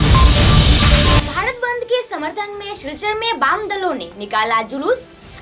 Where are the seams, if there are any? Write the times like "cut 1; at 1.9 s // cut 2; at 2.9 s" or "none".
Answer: cut 1; at 1.2 s